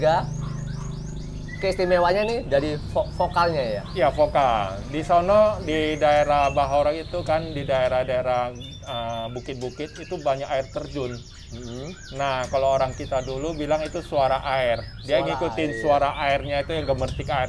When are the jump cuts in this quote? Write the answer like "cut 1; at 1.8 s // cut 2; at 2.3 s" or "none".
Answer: none